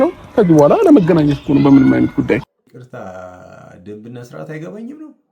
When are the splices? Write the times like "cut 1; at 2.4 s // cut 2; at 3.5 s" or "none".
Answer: cut 1; at 2.8 s

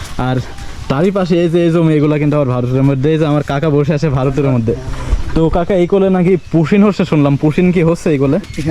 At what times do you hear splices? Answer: none

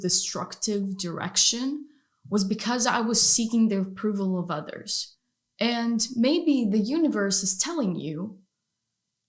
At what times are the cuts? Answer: cut 1; at 5.0 s

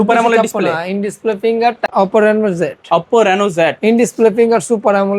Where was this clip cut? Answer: cut 1; at 1.9 s

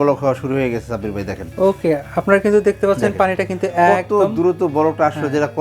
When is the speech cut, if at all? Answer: none

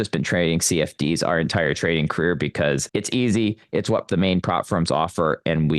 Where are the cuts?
cut 1; at 2.8 s // cut 2; at 4.1 s

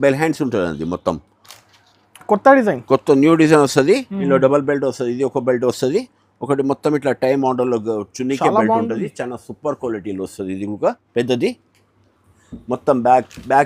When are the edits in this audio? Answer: cut 1; at 11.0 s

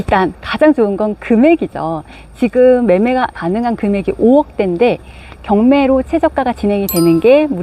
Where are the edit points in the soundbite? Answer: cut 1; at 3.4 s

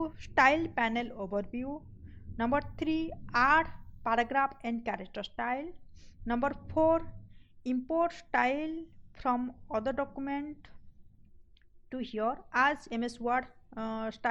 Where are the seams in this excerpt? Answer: none

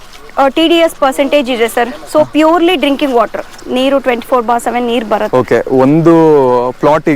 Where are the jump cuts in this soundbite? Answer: cut 1; at 3.6 s

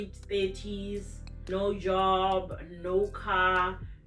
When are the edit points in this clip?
cut 1; at 1.3 s

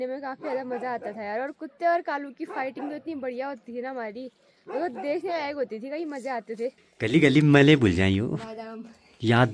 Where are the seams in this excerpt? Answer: cut 1; at 6.9 s

